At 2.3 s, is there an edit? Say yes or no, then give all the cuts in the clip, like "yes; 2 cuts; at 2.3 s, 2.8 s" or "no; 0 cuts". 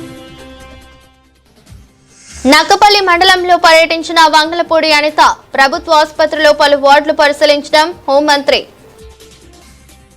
yes; 1 cut; at 2.3 s